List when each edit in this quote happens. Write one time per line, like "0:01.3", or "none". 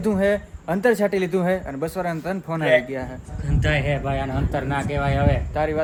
none